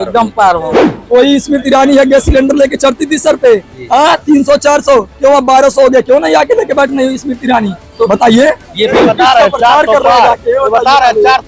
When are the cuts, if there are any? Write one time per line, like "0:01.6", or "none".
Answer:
0:00.9
0:09.0